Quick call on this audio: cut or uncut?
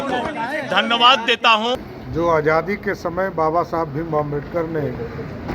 cut